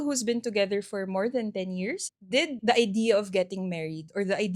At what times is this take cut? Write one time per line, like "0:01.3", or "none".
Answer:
0:02.0

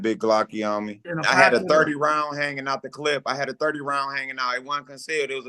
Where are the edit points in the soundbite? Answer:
0:01.0

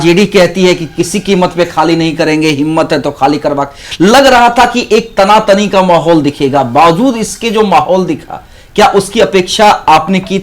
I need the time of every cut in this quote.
none

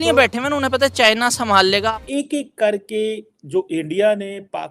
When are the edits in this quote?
0:01.9

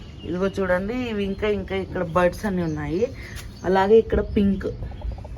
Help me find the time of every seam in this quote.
none

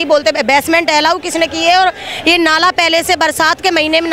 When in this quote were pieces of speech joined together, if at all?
none

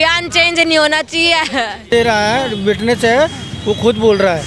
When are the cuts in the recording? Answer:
0:01.9

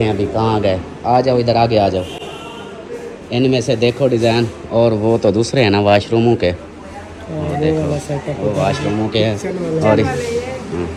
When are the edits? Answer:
none

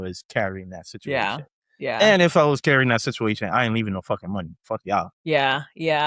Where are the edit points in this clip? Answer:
0:05.1

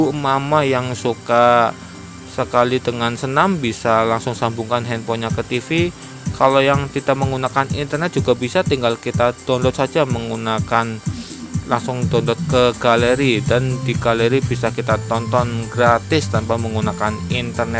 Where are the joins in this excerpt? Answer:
none

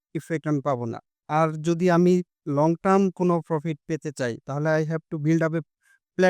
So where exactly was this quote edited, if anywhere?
0:01.1
0:02.4

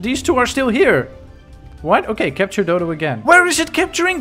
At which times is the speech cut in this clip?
0:03.2

